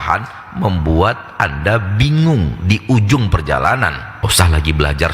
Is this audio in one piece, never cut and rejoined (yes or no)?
no